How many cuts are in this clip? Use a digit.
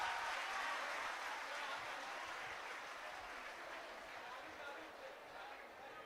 0